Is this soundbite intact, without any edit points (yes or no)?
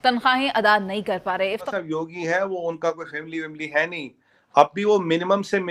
no